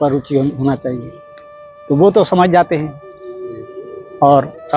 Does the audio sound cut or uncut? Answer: uncut